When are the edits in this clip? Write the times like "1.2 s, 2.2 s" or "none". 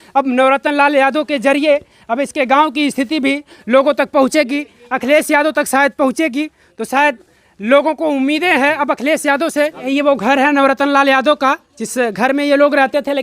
9.9 s